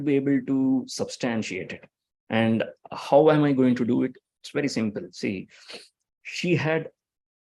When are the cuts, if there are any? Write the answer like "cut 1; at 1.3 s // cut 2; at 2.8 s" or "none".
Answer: none